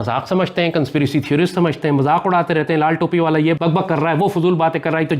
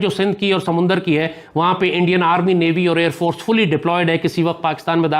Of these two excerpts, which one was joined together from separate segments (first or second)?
first